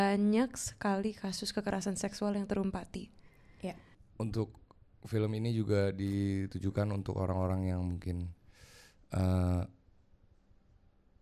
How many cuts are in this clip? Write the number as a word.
one